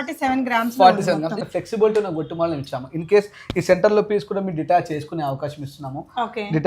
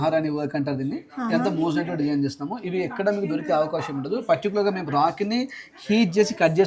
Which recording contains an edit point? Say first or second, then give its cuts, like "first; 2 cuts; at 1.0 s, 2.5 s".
first; 1 cut; at 1.4 s